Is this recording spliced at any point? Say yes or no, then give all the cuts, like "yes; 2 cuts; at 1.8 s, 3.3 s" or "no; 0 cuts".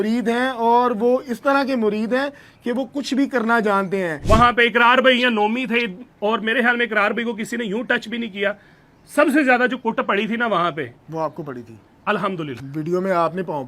yes; 2 cuts; at 4.2 s, 12.6 s